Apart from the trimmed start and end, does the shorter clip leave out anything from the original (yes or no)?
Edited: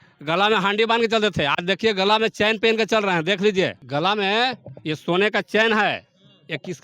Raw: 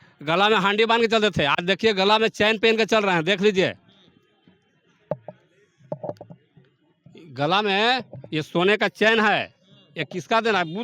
yes